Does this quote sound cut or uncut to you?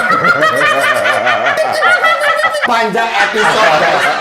cut